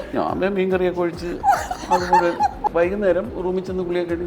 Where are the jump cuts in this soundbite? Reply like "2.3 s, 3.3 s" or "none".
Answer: 2.7 s, 3.3 s